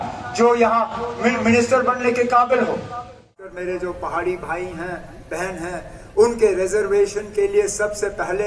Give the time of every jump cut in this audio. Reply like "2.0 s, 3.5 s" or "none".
3.3 s